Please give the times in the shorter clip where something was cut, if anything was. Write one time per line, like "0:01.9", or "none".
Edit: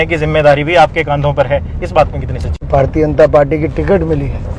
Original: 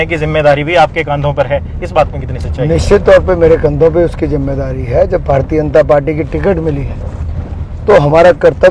0:02.6